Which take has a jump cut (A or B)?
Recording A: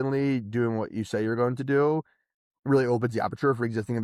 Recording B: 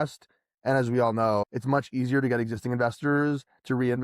B